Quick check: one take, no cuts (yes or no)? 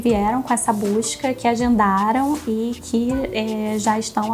yes